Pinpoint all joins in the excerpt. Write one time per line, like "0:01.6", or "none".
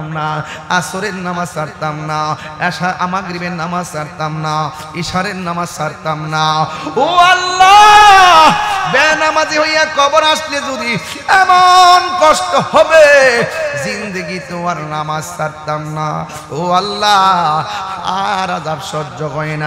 none